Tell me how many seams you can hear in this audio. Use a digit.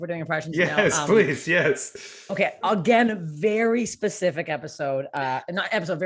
0